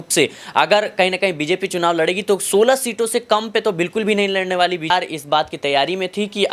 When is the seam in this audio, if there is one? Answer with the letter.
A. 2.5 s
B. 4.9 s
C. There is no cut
B